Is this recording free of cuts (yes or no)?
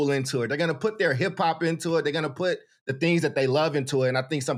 yes